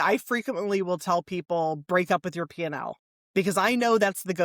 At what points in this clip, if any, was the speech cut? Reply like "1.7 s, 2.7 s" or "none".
none